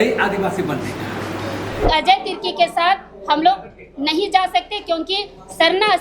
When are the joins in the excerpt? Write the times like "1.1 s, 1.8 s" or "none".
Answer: 1.8 s